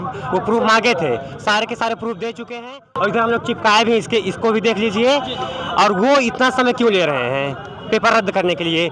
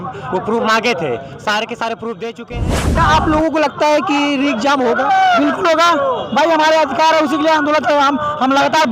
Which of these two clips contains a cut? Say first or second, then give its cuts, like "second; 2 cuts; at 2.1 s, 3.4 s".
second; 1 cut; at 2.8 s